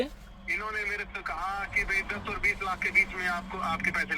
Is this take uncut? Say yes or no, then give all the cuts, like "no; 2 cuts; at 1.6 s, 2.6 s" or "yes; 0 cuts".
yes; 0 cuts